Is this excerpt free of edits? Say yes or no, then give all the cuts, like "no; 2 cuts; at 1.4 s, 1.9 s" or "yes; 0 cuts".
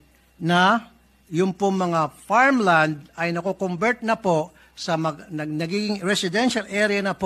yes; 0 cuts